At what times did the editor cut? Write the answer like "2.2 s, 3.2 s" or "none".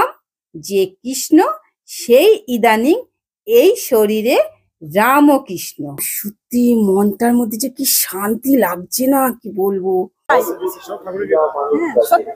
6.1 s, 10.3 s